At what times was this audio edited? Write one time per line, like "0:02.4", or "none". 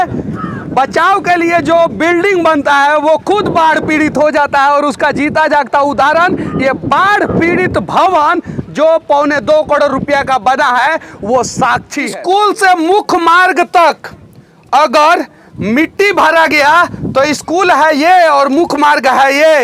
0:12.1